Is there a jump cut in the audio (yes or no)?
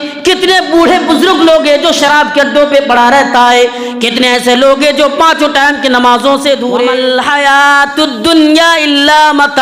yes